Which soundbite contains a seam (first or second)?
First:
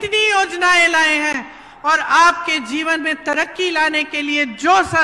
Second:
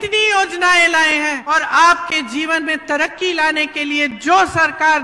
second